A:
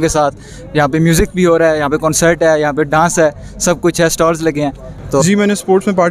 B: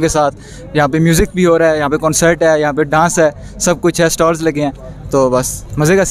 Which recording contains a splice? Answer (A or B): A